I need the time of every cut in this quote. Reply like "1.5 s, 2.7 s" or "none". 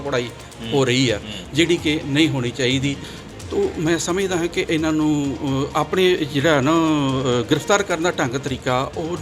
3.1 s